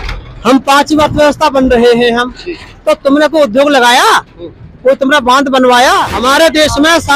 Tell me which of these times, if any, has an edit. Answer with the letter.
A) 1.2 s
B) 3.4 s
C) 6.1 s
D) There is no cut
C